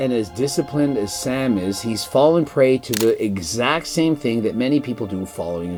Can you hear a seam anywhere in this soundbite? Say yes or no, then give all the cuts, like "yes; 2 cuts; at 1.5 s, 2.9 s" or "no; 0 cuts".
no; 0 cuts